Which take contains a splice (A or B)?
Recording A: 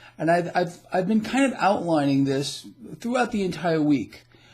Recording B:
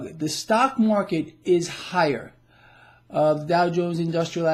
A